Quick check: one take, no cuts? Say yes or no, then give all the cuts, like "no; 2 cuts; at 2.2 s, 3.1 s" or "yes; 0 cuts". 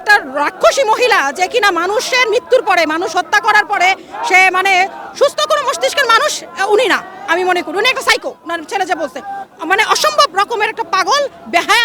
yes; 0 cuts